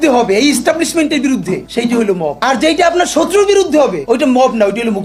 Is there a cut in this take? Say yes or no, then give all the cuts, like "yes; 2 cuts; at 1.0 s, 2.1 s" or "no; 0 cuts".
no; 0 cuts